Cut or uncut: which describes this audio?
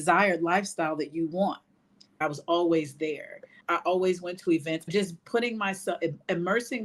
cut